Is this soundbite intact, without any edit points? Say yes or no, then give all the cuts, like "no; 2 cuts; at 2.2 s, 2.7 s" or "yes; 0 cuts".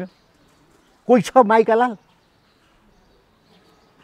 yes; 0 cuts